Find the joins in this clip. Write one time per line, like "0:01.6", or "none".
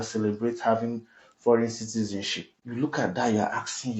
0:02.6